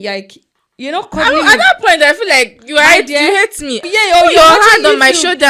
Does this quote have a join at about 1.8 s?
no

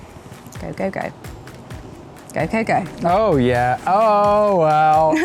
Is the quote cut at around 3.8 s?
no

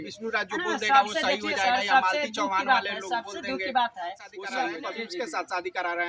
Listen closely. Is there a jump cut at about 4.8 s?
yes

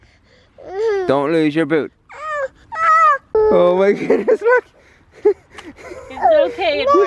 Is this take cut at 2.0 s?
no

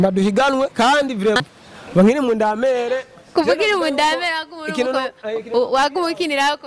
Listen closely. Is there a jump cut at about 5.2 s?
no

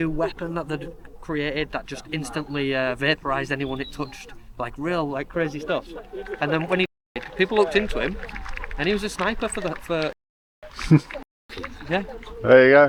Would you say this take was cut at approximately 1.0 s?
no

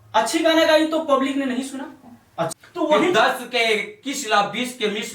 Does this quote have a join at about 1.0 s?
no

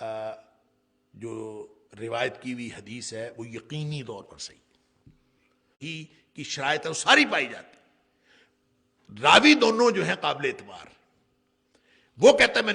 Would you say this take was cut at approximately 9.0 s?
no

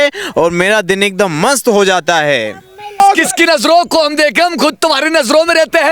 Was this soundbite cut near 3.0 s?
yes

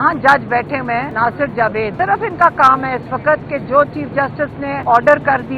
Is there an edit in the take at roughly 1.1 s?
yes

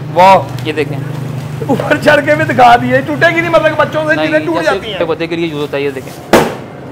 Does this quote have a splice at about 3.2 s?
no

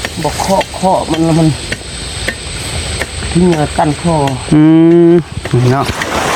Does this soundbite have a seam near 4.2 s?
no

